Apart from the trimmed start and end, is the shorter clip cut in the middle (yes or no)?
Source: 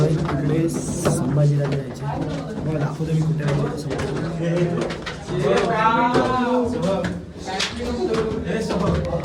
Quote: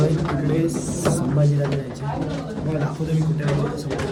no